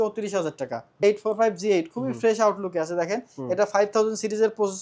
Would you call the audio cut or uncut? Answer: cut